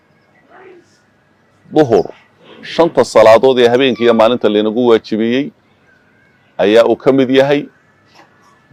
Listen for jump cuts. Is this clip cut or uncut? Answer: uncut